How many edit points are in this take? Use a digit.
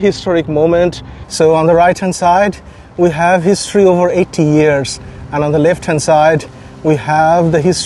1